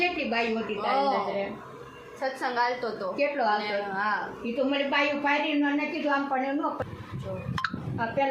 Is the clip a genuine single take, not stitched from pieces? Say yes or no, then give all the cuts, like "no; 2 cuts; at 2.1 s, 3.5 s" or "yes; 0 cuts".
no; 1 cut; at 6.8 s